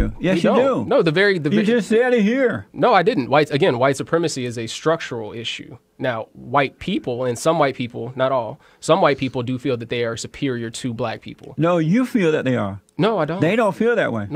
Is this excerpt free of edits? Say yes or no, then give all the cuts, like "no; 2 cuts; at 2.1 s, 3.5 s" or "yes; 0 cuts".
yes; 0 cuts